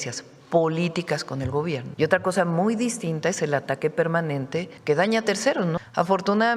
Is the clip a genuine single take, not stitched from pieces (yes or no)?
no